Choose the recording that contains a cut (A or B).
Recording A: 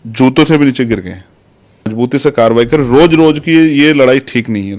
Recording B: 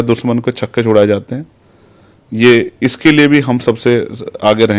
A